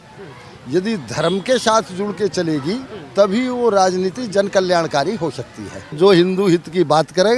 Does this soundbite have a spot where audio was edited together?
yes; 1 cut; at 5.9 s

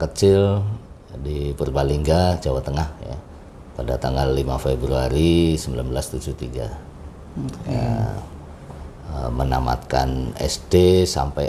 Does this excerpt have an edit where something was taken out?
no; 0 cuts

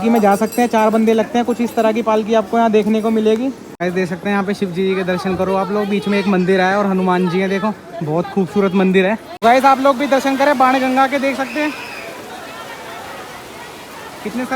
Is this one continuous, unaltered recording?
no; 2 cuts; at 3.7 s, 9.3 s

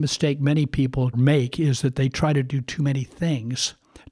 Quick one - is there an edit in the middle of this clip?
no; 0 cuts

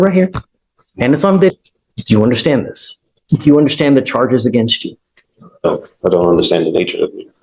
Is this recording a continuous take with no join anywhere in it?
no; 1 cut; at 1.5 s

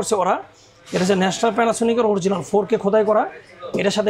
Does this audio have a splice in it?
no; 0 cuts

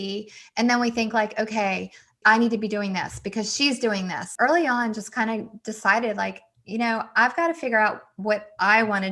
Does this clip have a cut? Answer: yes; 1 cut; at 4.3 s

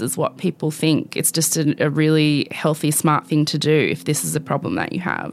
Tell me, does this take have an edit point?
no; 0 cuts

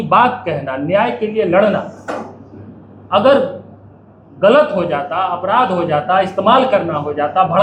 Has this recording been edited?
no; 0 cuts

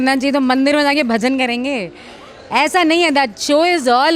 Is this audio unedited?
yes; 0 cuts

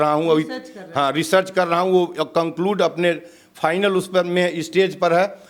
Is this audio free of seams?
yes; 0 cuts

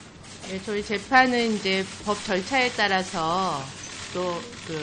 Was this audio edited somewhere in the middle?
yes; 1 cut; at 2.1 s

